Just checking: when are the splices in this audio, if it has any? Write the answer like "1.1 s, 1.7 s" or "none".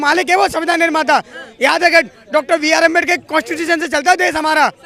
none